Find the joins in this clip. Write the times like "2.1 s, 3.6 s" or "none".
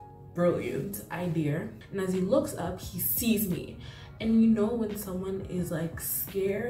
1.8 s